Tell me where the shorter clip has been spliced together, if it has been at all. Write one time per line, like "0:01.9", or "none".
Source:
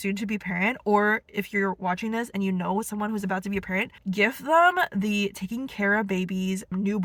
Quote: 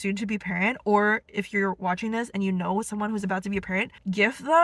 none